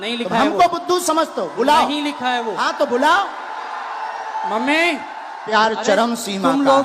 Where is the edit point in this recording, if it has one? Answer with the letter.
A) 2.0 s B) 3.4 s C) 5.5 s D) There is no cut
C